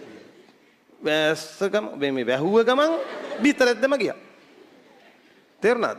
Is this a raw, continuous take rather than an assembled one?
yes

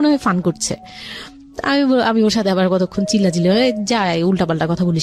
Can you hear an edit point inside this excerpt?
no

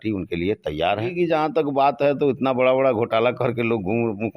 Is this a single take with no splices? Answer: no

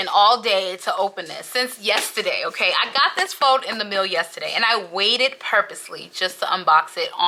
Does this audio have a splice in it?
no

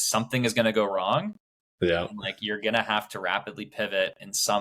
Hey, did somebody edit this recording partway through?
no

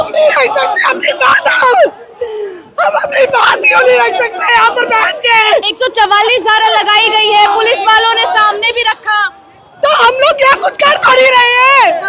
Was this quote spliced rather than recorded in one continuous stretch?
no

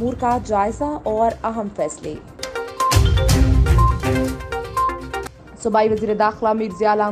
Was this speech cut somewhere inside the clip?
yes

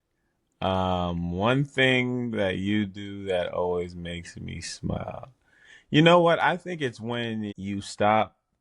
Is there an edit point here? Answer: yes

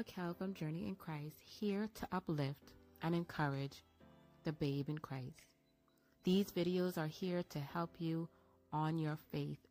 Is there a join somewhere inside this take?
no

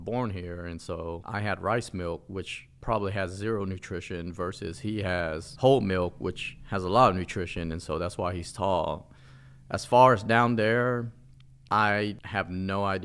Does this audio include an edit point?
no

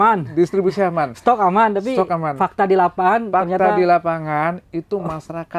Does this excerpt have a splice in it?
no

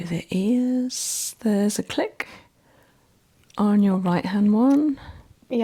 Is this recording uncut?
yes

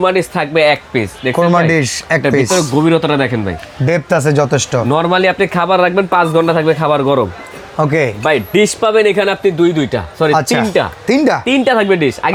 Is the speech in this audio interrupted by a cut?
no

